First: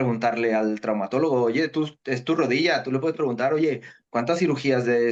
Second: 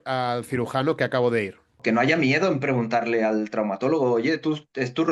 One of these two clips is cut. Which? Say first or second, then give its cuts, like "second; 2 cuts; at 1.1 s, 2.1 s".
second; 1 cut; at 1.8 s